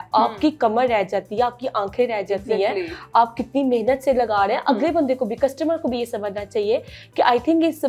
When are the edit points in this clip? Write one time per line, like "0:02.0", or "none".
none